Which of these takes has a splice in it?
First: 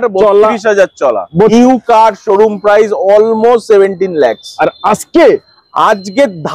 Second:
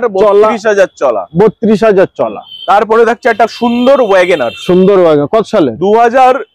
first; 1 cut; at 1.5 s

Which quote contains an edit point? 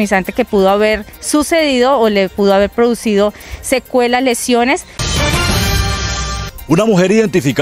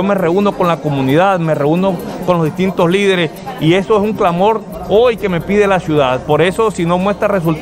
first; 2 cuts; at 5.0 s, 6.5 s

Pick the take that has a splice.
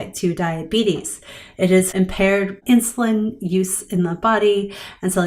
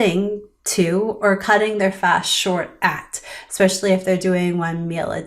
first; 1 cut; at 2.3 s

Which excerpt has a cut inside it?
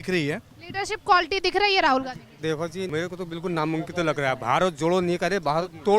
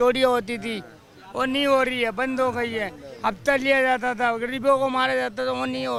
first; 1 cut; at 2.6 s

